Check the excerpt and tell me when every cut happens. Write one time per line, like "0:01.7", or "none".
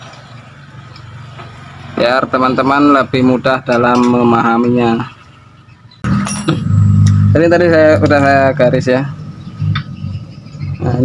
0:06.0